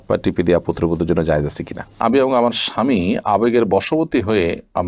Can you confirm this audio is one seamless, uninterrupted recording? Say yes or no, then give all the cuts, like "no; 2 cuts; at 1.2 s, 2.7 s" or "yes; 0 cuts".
no; 1 cut; at 1.9 s